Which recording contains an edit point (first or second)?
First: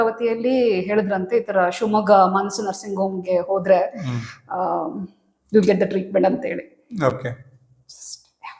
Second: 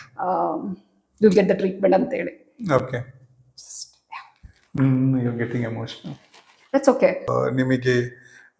second